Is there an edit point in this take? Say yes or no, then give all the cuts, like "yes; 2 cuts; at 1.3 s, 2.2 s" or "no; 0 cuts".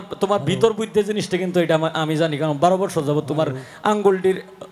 no; 0 cuts